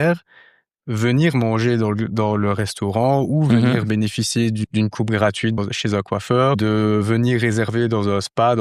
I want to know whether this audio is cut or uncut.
cut